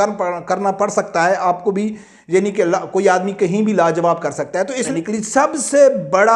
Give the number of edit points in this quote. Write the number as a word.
one